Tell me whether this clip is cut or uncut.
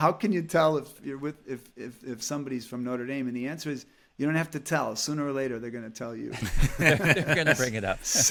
uncut